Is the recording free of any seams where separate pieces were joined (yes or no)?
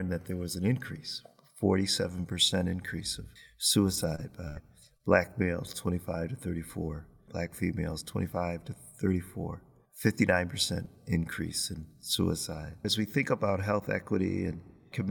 no